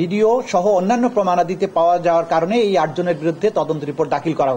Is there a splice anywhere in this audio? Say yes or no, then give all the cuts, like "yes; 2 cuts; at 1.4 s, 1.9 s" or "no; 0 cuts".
no; 0 cuts